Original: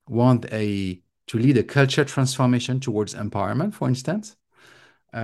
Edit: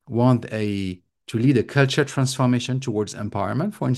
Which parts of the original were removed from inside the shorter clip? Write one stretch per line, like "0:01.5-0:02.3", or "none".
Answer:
none